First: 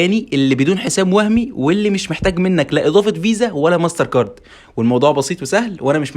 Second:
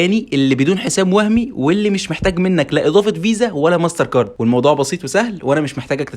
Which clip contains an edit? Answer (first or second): second